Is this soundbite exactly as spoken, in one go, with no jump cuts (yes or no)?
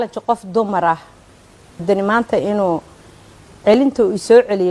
no